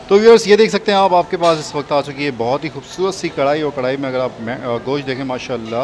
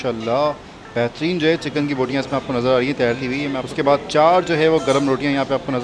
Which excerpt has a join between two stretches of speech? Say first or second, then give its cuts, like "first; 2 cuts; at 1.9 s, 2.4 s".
second; 1 cut; at 3.6 s